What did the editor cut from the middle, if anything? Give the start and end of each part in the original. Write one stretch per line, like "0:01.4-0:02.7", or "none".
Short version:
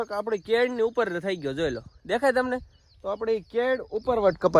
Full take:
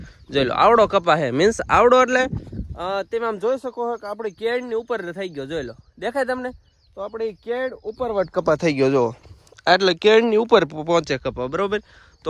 none